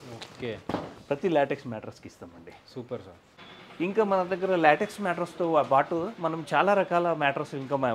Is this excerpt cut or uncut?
uncut